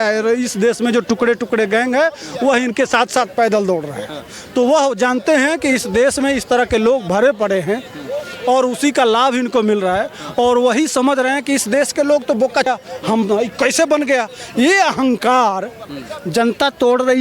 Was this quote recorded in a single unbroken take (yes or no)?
no